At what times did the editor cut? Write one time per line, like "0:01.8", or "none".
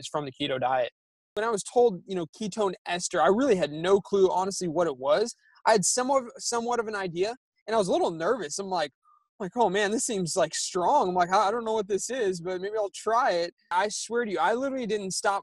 0:01.3
0:13.7